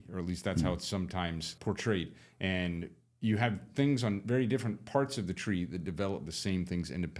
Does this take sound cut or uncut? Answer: cut